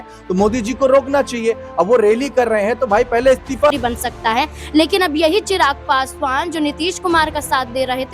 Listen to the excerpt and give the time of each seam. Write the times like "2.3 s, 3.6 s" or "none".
3.7 s